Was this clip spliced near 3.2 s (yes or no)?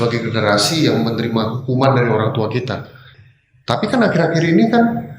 yes